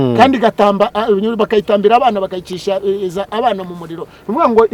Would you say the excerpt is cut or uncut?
uncut